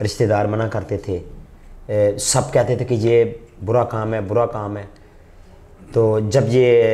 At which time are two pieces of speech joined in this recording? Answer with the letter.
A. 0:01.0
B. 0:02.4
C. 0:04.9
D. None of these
D